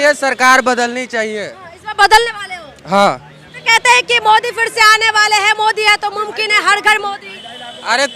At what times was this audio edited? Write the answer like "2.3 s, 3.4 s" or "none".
none